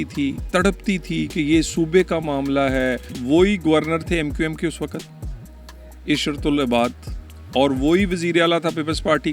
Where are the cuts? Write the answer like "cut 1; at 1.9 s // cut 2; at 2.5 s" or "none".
cut 1; at 3.1 s

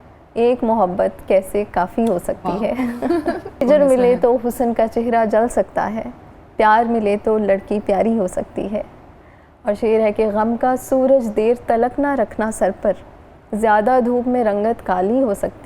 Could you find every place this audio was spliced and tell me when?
cut 1; at 3.6 s

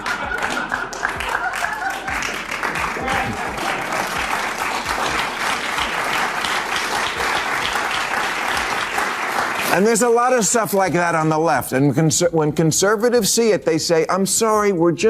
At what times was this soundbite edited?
cut 1; at 9.6 s

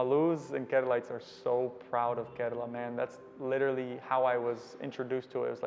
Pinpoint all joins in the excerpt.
none

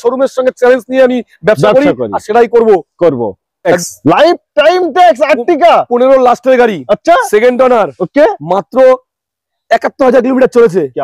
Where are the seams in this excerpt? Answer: cut 1; at 3.8 s

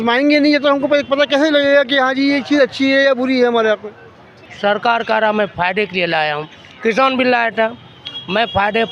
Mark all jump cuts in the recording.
cut 1; at 4.4 s

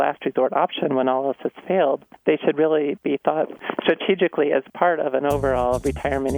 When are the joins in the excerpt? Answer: cut 1; at 2.1 s // cut 2; at 3.6 s

